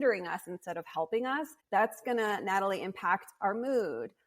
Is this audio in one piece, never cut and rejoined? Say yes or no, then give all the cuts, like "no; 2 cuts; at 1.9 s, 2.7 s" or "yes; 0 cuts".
no; 1 cut; at 1.5 s